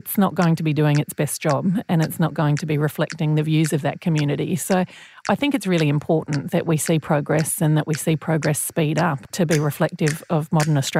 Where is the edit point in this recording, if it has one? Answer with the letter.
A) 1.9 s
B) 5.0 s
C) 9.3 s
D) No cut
C